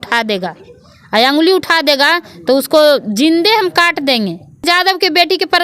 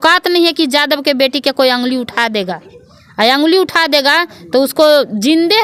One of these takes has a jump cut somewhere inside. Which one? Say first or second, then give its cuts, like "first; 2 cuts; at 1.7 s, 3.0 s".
first; 1 cut; at 4.6 s